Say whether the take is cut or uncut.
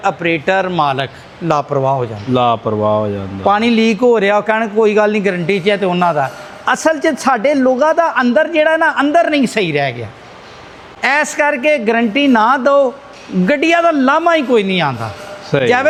uncut